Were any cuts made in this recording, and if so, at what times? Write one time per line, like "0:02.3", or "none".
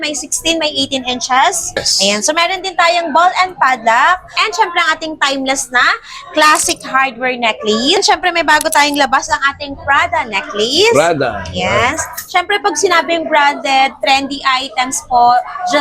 0:01.9
0:04.4
0:08.0